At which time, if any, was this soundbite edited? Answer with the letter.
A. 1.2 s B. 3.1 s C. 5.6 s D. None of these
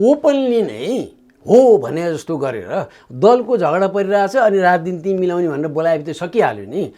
D